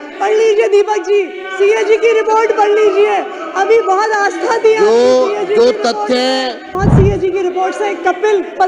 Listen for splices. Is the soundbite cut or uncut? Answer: cut